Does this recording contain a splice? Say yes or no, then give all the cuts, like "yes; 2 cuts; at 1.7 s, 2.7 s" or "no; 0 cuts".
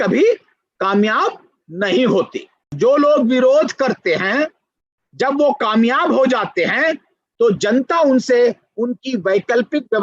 yes; 1 cut; at 2.8 s